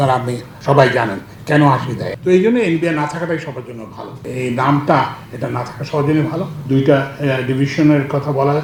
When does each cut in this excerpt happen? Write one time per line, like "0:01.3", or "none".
none

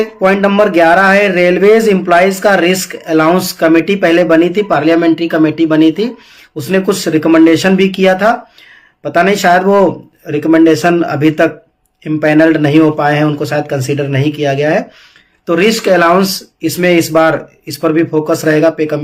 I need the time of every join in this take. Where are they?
none

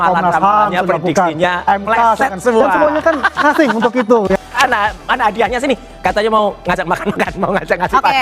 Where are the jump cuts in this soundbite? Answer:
0:04.4

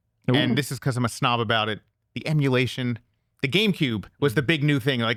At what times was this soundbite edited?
none

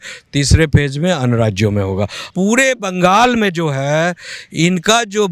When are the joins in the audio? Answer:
0:02.2

